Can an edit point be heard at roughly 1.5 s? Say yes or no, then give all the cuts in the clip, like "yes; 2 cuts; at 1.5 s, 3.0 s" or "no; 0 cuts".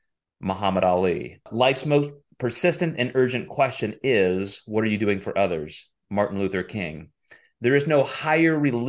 yes; 1 cut; at 1.5 s